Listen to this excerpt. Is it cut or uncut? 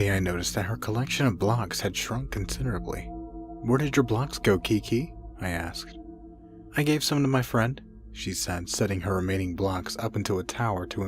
cut